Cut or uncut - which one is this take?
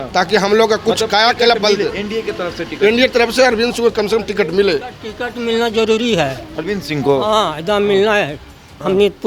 uncut